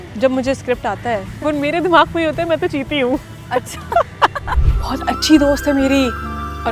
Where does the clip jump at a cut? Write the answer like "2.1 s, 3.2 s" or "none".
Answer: 1.3 s, 4.4 s

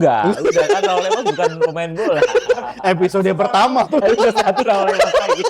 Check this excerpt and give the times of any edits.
none

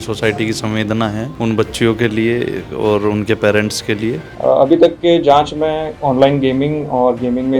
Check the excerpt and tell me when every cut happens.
1.3 s, 4.3 s, 5.9 s

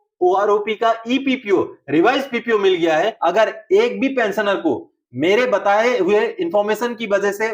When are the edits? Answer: 3.1 s

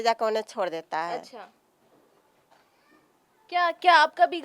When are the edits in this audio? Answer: none

